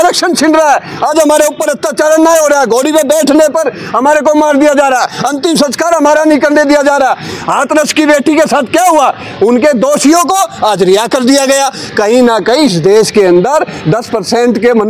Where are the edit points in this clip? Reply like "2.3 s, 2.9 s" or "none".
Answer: none